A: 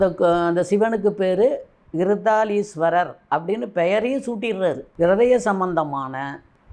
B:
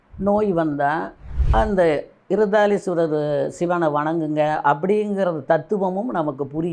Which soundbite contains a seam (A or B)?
A